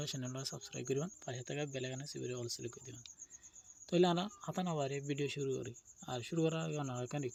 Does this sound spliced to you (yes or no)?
no